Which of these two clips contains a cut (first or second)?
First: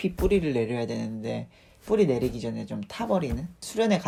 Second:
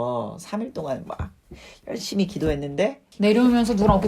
second